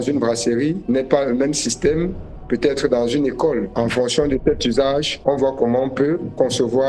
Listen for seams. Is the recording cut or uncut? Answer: uncut